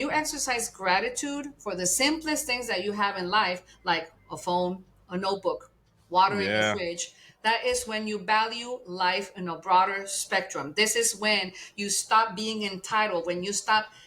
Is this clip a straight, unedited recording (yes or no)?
yes